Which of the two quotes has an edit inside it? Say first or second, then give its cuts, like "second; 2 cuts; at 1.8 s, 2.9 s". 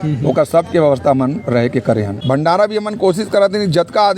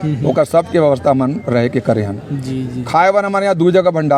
first; 1 cut; at 2.2 s